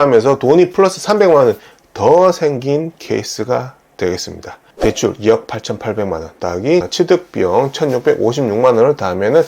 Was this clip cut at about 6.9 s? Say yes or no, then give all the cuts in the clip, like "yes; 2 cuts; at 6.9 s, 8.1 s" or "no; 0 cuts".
yes; 2 cuts; at 4.7 s, 6.9 s